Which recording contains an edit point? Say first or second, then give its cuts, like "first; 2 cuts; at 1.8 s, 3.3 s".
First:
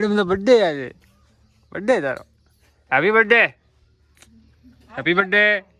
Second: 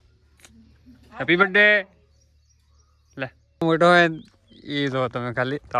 second; 1 cut; at 3.6 s